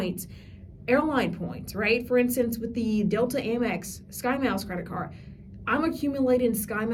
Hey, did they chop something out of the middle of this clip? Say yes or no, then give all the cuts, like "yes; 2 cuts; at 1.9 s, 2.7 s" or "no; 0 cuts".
no; 0 cuts